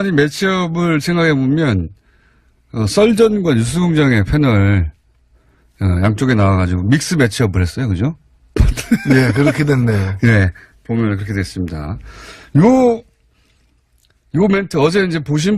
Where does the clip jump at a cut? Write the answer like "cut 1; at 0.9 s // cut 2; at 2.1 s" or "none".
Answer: cut 1; at 10.6 s